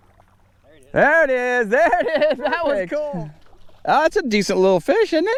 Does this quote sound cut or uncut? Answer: uncut